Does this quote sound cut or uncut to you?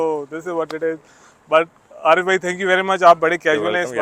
uncut